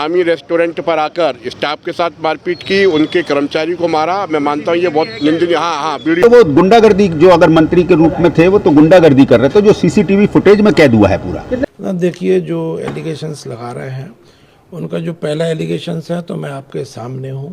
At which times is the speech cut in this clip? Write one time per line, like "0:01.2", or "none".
0:06.2
0:11.6